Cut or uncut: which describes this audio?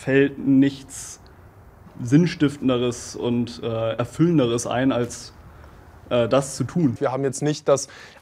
cut